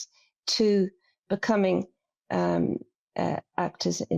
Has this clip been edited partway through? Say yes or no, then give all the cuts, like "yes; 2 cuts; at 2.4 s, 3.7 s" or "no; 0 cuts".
no; 0 cuts